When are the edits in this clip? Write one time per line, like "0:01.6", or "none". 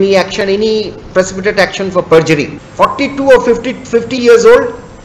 0:02.6